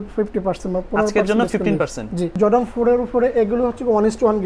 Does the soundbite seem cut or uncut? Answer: cut